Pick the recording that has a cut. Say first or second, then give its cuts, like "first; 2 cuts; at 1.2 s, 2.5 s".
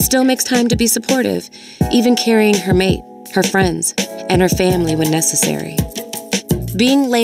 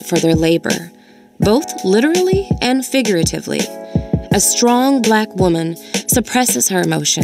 second; 1 cut; at 3.8 s